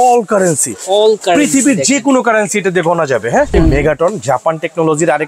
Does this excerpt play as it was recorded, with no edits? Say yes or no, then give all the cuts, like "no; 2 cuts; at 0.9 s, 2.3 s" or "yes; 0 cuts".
no; 1 cut; at 3.5 s